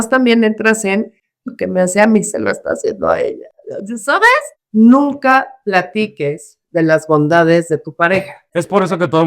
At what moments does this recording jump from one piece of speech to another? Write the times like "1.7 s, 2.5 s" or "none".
4.5 s